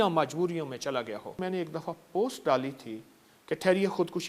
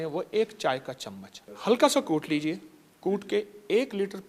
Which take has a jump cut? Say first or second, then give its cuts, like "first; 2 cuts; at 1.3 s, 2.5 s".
first; 1 cut; at 1.4 s